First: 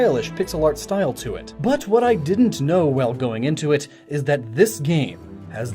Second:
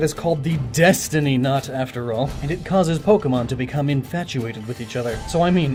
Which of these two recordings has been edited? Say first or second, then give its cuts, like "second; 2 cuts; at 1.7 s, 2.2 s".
first; 1 cut; at 2.1 s